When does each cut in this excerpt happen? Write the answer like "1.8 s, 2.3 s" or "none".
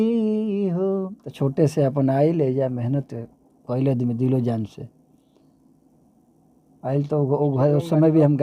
1.2 s